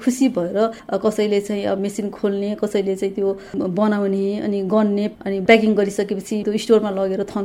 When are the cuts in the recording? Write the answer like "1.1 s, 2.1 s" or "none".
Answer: 0.8 s, 1.8 s, 5.1 s, 6.4 s